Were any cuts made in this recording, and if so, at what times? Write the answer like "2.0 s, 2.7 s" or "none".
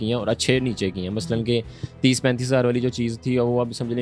none